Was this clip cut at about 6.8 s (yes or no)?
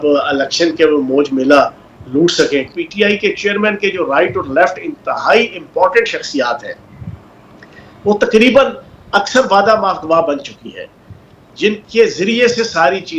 no